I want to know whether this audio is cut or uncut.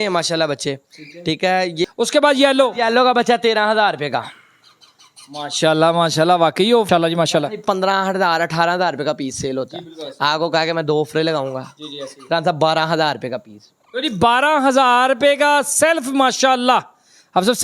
cut